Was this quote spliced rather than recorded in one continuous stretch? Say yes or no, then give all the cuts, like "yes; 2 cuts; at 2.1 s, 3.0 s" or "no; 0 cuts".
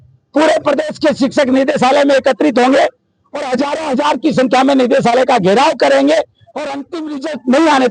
no; 0 cuts